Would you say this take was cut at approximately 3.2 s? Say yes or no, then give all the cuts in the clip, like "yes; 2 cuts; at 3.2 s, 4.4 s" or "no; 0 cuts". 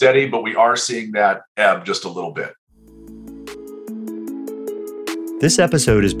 yes; 2 cuts; at 3.2 s, 4.7 s